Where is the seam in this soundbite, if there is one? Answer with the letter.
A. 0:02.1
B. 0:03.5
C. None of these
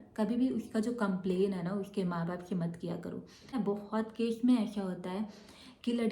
B